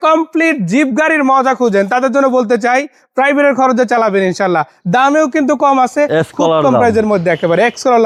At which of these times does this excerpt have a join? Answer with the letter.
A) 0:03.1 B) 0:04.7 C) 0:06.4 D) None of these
D